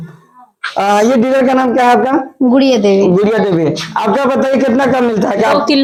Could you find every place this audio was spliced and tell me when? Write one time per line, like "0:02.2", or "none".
none